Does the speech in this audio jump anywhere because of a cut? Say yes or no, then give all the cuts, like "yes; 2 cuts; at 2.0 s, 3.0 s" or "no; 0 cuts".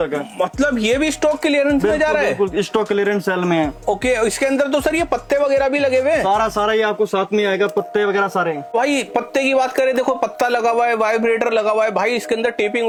no; 0 cuts